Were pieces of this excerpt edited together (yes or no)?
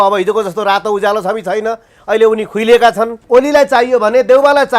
yes